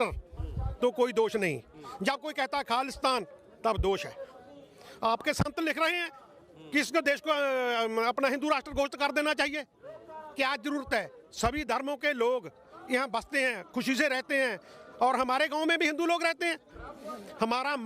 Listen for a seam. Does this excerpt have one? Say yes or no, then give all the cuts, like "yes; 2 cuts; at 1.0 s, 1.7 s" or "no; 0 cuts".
no; 0 cuts